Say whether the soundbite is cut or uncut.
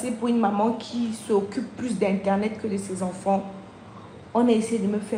uncut